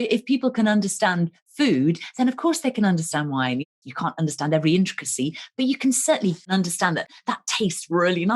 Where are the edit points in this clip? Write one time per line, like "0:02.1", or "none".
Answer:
0:03.7
0:06.5